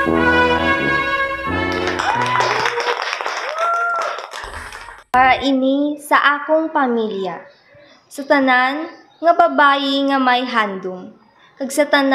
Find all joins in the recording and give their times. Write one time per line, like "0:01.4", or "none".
0:02.0
0:05.1